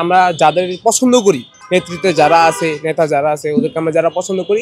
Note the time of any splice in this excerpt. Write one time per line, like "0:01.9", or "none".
0:01.5